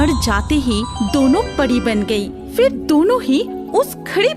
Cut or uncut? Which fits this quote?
uncut